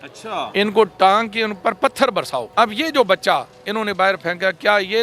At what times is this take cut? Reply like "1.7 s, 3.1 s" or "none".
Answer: 2.5 s